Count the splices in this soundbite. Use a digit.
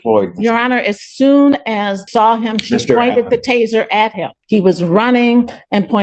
2